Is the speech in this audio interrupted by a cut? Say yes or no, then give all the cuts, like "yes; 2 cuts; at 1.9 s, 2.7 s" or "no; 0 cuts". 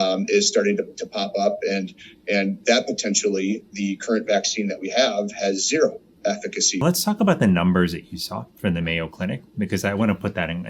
yes; 1 cut; at 6.8 s